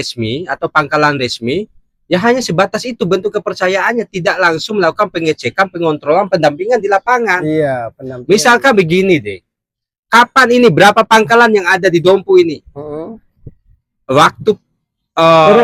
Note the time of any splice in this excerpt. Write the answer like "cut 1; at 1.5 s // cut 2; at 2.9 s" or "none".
none